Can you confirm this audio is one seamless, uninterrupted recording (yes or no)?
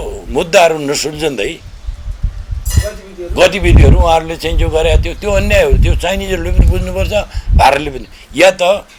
yes